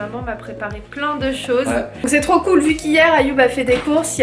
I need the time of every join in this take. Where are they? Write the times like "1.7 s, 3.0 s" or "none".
2.0 s